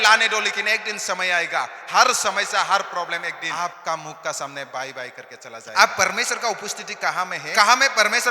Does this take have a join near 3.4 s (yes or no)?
yes